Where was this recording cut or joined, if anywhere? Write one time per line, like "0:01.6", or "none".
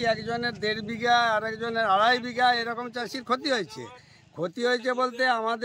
none